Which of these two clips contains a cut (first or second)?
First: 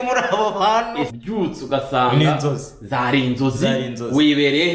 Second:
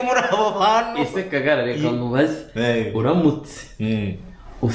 first